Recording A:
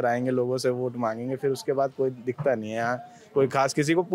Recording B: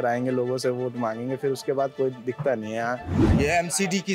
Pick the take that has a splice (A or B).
B